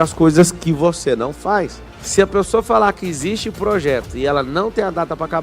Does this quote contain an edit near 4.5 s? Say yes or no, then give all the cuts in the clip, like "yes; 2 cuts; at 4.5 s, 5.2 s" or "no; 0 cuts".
no; 1 cut; at 1.7 s